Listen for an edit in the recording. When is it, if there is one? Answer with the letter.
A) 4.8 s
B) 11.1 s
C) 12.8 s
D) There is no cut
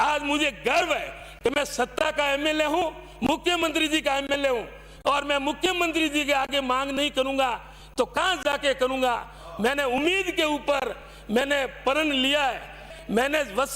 C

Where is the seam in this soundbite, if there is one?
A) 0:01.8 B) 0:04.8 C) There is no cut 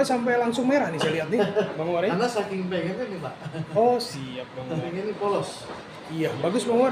B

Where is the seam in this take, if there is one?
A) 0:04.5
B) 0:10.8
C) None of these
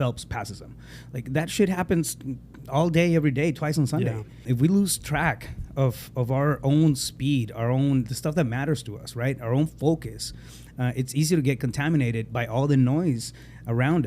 A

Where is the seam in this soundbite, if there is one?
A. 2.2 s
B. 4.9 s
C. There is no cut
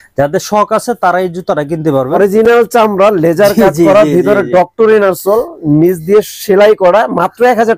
A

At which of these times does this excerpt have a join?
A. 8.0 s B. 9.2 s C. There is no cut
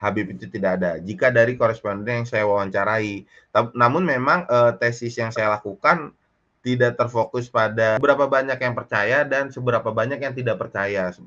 A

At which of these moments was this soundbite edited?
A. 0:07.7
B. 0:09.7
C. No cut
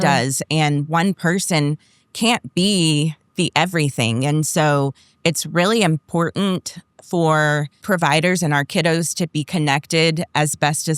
A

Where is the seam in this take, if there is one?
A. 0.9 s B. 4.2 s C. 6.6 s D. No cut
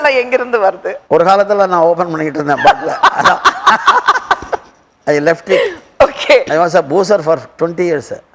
A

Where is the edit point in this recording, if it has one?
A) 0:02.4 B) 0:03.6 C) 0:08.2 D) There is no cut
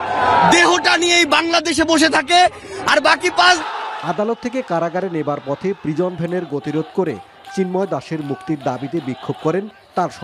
B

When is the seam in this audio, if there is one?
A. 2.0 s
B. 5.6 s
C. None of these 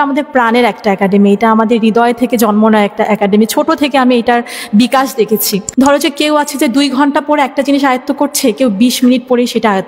B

